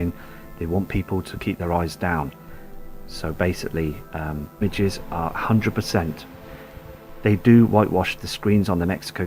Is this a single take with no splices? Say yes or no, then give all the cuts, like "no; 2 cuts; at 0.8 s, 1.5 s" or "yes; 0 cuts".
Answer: yes; 0 cuts